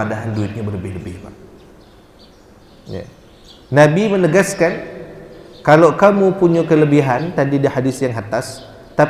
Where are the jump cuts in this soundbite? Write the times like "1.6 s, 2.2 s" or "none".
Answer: none